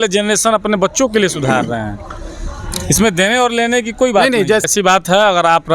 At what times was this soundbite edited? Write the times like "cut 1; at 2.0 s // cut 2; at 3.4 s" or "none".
cut 1; at 4.6 s